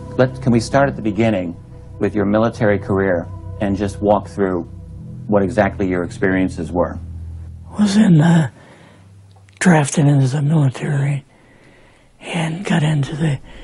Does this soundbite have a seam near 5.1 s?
yes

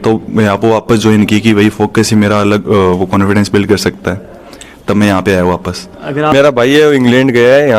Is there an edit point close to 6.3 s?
yes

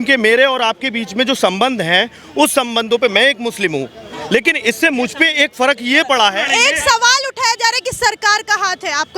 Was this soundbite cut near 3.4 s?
no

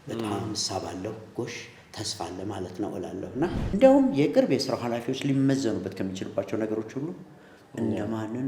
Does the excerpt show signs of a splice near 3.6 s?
yes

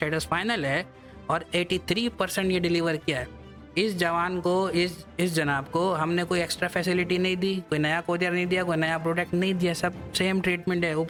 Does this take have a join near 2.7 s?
no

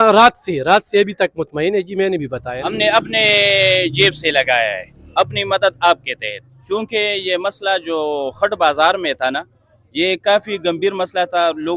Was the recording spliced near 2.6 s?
yes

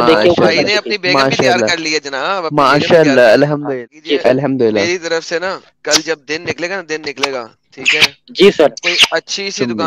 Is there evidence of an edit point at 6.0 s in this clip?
no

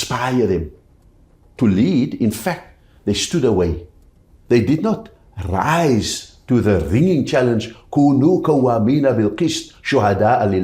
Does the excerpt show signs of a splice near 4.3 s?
yes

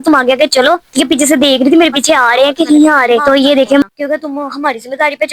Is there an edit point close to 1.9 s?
no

